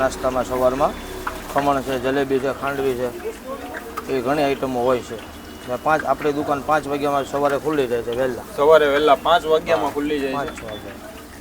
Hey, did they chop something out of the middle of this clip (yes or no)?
no